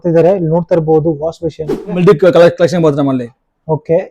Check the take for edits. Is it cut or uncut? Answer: cut